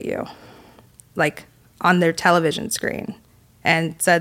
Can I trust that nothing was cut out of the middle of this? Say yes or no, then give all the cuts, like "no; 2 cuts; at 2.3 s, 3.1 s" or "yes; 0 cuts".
yes; 0 cuts